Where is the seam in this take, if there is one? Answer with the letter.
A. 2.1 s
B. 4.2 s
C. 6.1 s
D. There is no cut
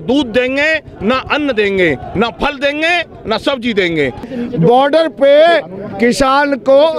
B